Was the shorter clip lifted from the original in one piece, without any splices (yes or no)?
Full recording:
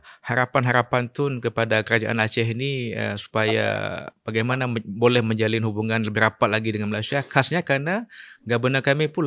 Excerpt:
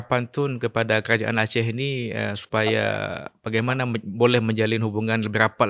yes